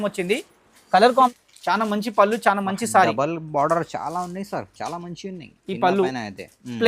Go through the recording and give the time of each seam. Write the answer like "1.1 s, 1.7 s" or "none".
1.3 s